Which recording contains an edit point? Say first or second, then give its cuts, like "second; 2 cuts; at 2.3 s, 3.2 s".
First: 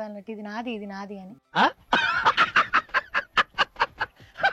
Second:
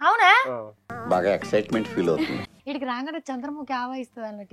second; 1 cut; at 2.5 s